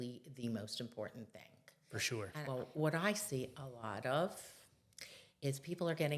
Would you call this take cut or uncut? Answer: cut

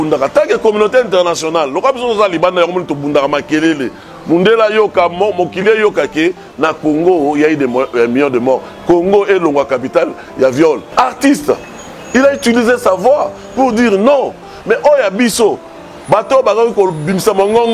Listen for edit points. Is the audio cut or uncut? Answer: cut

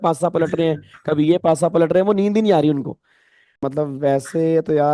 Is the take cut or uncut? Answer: cut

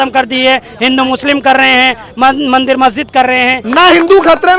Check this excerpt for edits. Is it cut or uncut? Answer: cut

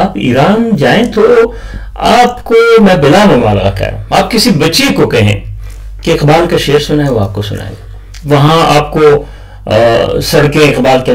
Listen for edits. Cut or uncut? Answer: uncut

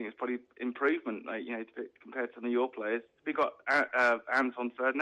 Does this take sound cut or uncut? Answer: cut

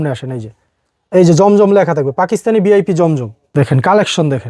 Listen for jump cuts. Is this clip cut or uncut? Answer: cut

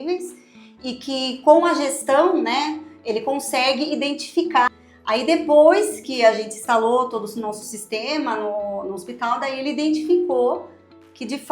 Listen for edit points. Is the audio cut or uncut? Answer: cut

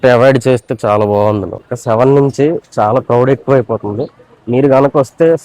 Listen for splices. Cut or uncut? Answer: cut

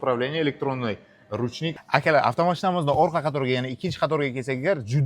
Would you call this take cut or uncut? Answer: cut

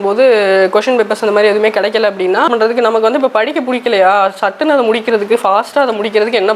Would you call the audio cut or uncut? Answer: cut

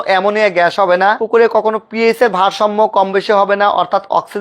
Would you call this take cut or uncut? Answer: cut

